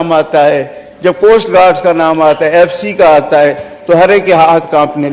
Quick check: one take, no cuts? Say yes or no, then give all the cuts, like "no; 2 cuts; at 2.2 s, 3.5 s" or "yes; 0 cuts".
yes; 0 cuts